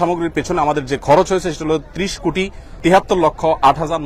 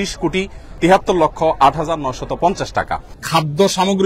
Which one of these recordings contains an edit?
second; 1 cut; at 3.1 s

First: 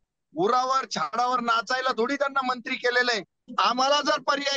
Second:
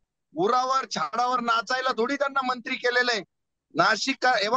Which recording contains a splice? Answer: first; 1 cut; at 3.4 s

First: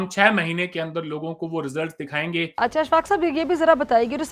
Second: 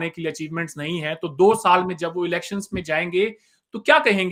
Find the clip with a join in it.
first; 1 cut; at 2.5 s

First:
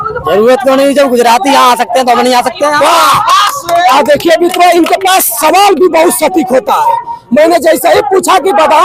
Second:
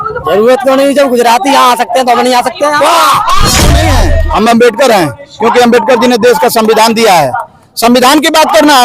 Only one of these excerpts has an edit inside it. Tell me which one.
second; 1 cut; at 3.8 s

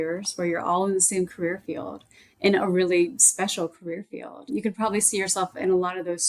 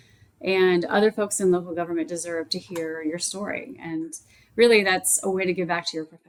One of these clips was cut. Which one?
first; 1 cut; at 4.5 s

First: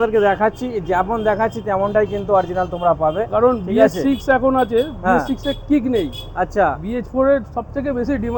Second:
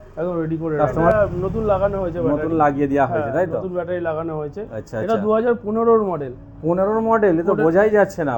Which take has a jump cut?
second; 1 cut; at 1.1 s

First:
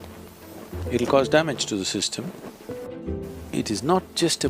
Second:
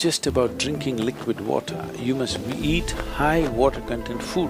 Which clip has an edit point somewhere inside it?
first; 1 cut; at 2.9 s

